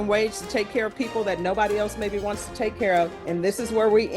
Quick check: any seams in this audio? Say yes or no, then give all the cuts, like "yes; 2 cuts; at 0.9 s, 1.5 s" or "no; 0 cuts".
yes; 1 cut; at 3.2 s